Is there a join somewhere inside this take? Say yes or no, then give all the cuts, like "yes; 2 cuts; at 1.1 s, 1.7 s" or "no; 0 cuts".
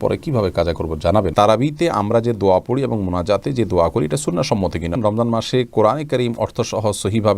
yes; 2 cuts; at 1.3 s, 4.9 s